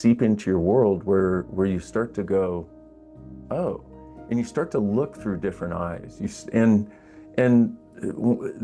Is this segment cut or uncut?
uncut